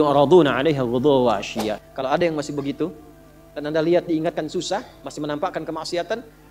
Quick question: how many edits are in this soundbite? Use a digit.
1